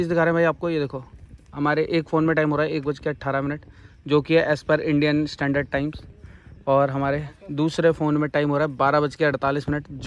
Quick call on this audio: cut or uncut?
uncut